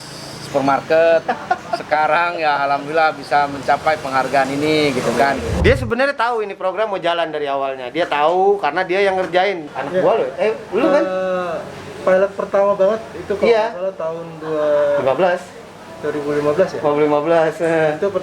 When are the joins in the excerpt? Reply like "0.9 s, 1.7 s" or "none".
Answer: 5.6 s